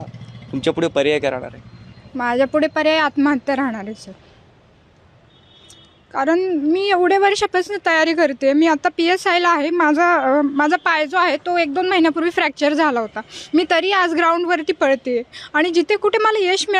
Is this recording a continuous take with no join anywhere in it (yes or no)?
yes